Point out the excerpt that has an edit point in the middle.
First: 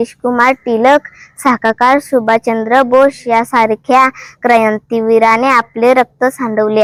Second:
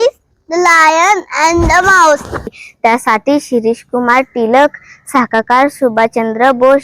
second; 1 cut; at 2.6 s

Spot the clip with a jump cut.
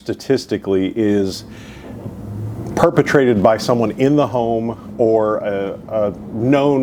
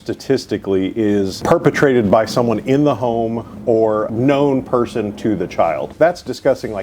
second; 3 cuts; at 1.4 s, 4.1 s, 5.9 s

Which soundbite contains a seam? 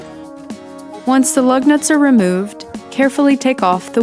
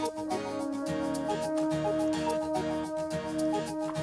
first; 1 cut; at 1.0 s

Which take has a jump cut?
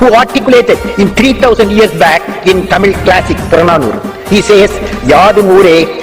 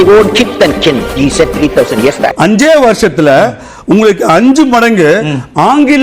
second; 1 cut; at 2.3 s

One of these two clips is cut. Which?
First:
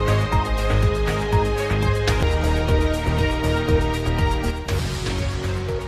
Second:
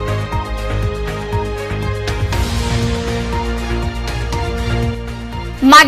second; 1 cut; at 2.2 s

